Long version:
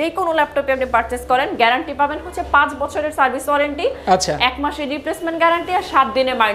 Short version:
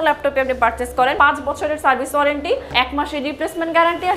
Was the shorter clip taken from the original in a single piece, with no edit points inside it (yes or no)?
no